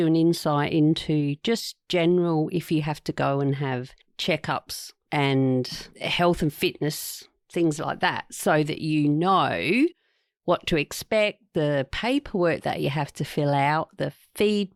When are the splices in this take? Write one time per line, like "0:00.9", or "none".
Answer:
none